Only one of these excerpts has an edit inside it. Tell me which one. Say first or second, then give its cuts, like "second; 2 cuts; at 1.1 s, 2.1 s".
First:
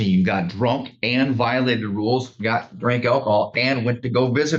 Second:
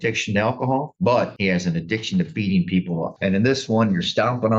second; 1 cut; at 3.1 s